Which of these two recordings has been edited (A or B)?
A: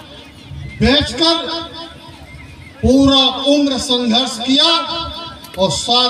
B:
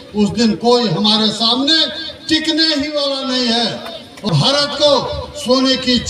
B